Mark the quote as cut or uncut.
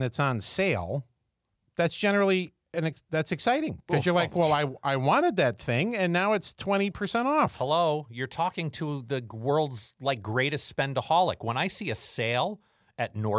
uncut